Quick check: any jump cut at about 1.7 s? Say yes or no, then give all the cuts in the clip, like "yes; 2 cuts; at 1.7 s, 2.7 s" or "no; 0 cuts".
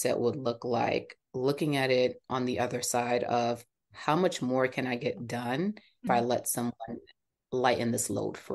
no; 1 cut; at 6.0 s